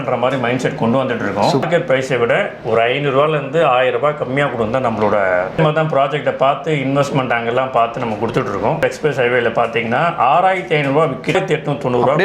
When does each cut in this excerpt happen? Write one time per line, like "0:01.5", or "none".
0:01.6
0:05.6
0:08.8
0:11.3